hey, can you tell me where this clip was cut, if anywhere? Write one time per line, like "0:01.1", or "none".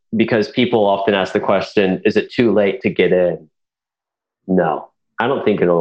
none